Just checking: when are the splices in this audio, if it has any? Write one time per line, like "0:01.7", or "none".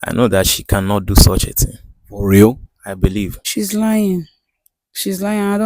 0:03.4